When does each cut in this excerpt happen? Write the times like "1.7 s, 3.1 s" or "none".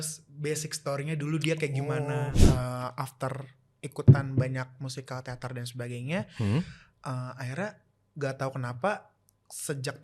2.3 s